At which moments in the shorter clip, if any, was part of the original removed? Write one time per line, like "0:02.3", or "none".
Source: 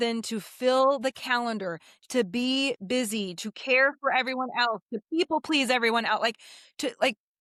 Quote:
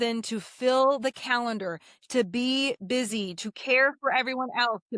none